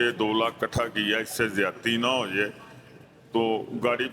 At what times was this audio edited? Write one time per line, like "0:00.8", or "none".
none

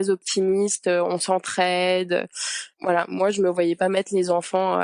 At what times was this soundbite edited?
none

